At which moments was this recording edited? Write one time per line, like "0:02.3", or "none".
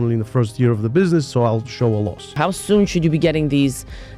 0:02.4